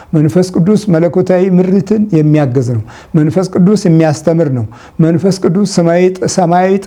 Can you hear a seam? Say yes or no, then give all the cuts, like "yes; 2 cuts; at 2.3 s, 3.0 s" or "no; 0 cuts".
no; 0 cuts